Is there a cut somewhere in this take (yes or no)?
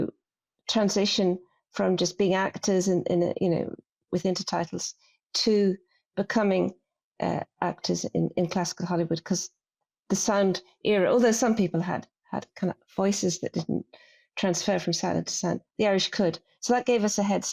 yes